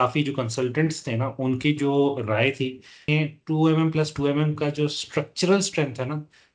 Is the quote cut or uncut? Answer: cut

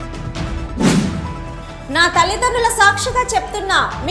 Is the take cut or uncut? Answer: uncut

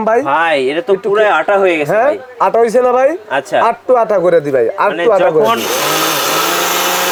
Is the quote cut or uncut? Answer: uncut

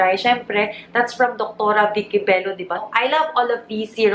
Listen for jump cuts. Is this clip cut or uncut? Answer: cut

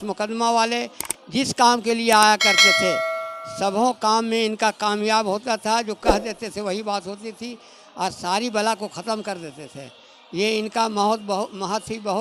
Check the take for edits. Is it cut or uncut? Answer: uncut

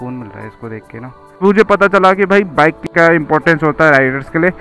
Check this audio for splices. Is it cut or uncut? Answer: cut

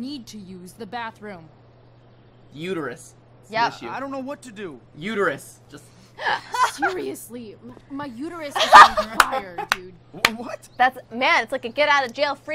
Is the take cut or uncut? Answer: cut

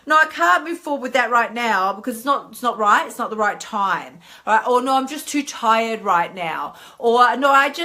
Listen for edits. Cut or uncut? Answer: uncut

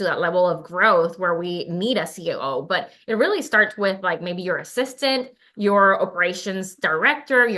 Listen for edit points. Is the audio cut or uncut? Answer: uncut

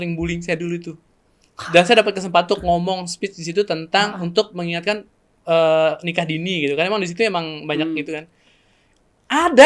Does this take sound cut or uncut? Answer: uncut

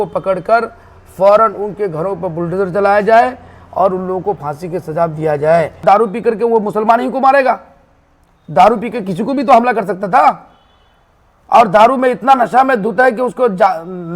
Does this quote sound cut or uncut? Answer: cut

